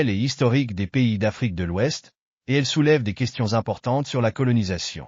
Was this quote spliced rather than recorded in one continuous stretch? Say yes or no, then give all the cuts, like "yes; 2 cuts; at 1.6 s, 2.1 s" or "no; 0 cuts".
no; 0 cuts